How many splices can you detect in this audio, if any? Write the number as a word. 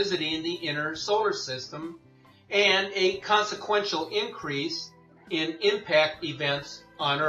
zero